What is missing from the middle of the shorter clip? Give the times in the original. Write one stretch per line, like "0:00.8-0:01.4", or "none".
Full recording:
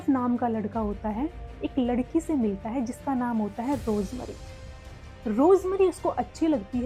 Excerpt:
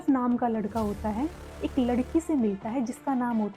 none